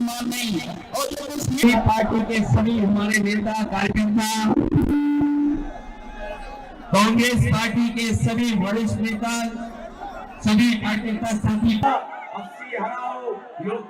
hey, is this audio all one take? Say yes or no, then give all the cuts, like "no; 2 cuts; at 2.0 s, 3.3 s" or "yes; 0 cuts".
no; 2 cuts; at 1.6 s, 11.8 s